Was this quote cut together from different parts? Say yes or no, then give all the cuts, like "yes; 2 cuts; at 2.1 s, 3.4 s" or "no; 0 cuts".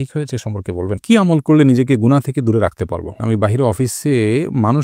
yes; 2 cuts; at 1.0 s, 3.2 s